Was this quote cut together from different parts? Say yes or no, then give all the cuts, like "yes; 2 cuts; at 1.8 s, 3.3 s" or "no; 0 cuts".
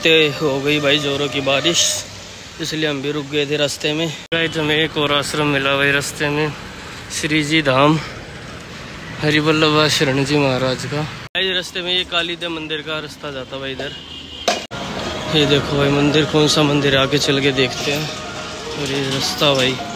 yes; 3 cuts; at 4.2 s, 11.2 s, 14.7 s